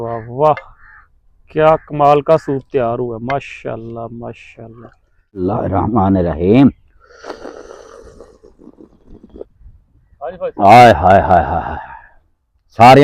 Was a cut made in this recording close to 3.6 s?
no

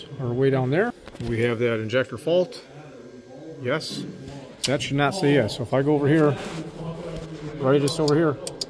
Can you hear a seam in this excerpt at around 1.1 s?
yes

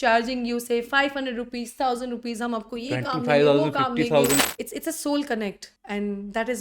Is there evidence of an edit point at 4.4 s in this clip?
yes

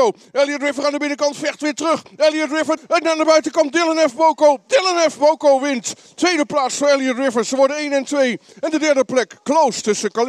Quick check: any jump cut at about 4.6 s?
no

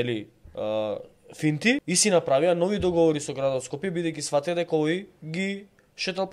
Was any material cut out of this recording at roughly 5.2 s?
no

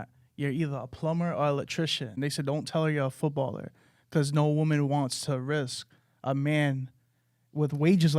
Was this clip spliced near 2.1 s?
yes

